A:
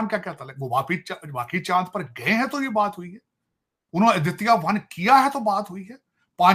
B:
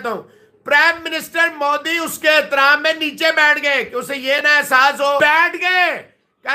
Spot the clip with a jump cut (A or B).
B